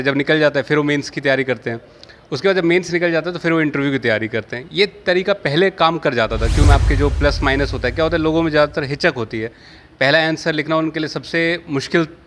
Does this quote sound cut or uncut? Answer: cut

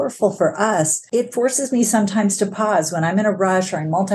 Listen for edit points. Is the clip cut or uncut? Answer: cut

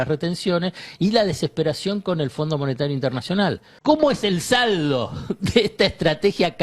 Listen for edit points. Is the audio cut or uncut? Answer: cut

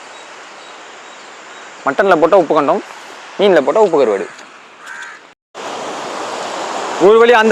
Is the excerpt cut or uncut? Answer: cut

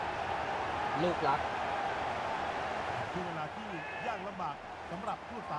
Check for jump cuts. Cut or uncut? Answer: uncut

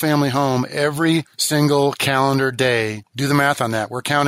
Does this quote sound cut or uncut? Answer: cut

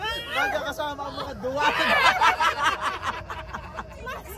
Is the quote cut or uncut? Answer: uncut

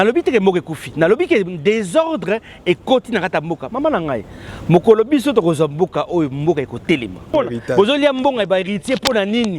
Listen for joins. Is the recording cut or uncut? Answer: cut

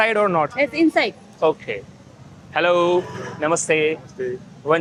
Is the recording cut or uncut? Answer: uncut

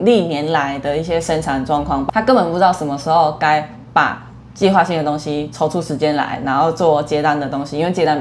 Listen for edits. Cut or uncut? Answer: cut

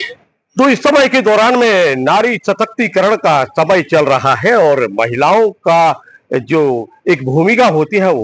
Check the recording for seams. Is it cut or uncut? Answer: uncut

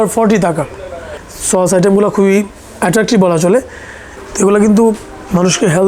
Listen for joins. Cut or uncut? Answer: cut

